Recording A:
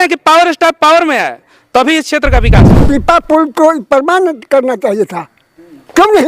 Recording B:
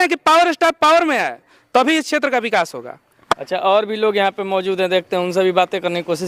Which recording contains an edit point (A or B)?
A